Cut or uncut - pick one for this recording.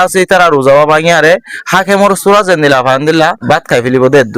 cut